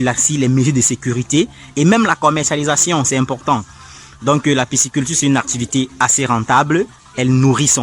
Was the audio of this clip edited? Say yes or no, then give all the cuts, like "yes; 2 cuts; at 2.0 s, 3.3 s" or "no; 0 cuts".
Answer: no; 0 cuts